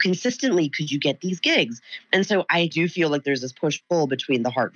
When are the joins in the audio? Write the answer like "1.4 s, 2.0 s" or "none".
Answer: 2.6 s